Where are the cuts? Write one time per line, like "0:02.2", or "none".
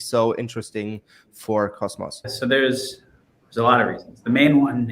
0:02.3